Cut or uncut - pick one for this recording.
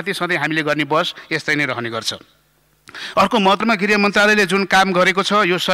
cut